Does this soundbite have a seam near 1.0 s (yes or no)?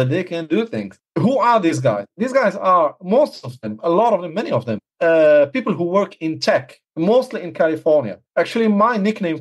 yes